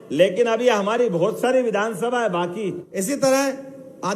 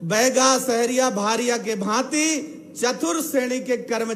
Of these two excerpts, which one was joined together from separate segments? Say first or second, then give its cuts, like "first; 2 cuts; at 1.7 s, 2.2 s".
first; 1 cut; at 2.8 s